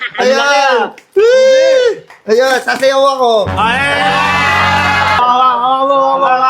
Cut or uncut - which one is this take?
cut